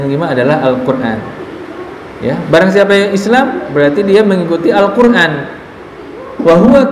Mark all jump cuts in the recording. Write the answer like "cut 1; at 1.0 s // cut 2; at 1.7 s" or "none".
none